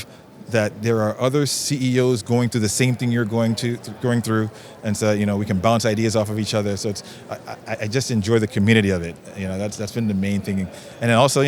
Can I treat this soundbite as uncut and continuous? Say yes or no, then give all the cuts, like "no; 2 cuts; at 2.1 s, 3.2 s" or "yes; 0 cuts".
yes; 0 cuts